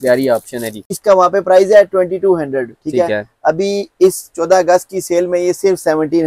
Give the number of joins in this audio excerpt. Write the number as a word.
one